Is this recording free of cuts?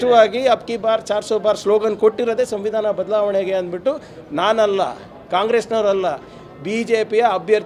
yes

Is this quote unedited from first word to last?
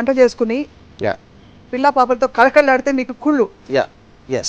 yes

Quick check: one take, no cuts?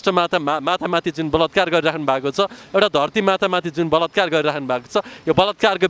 yes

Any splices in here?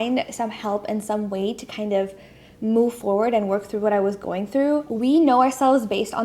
yes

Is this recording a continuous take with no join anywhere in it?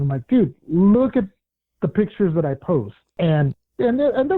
no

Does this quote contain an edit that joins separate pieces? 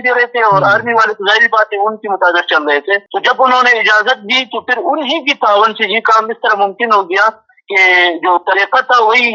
yes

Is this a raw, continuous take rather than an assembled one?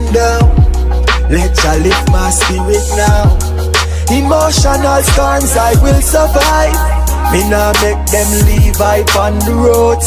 yes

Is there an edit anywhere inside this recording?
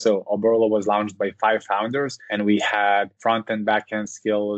yes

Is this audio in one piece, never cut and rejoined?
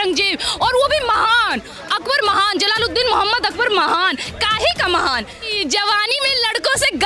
no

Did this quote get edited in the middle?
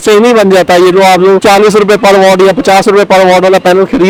no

